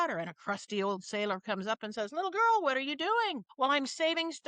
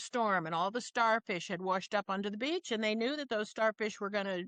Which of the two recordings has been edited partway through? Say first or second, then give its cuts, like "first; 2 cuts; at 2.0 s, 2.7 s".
first; 1 cut; at 3.4 s